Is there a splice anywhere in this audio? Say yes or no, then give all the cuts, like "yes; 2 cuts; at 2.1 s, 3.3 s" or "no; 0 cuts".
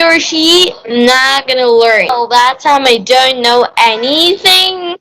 yes; 1 cut; at 2.3 s